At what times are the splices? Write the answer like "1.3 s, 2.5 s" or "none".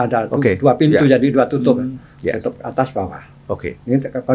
none